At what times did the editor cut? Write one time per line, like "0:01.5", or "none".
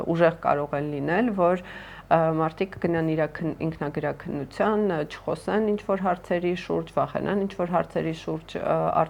none